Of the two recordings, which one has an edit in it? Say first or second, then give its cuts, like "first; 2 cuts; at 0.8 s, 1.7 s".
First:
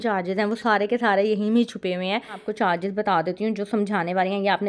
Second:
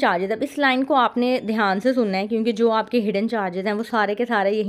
first; 1 cut; at 2.5 s